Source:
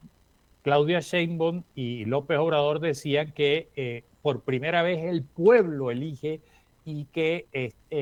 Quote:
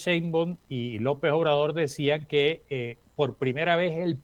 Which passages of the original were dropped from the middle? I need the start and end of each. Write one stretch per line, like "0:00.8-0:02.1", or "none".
none